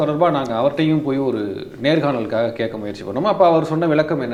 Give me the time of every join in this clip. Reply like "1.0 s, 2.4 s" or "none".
none

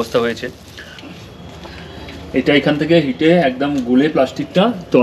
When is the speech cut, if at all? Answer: 1.1 s

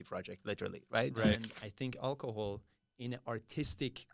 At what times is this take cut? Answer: 1.4 s

